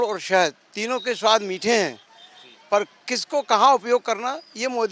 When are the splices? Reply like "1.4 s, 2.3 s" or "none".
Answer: none